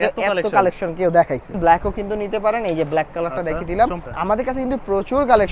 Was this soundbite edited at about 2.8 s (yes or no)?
no